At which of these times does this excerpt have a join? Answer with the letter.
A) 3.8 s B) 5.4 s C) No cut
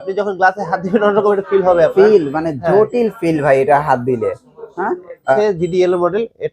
B